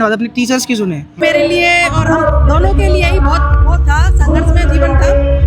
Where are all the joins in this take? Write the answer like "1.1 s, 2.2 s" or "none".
1.2 s